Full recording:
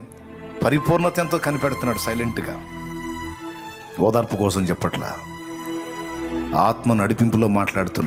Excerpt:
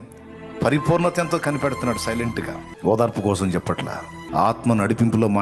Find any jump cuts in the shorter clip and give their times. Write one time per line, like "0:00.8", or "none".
0:02.6
0:04.3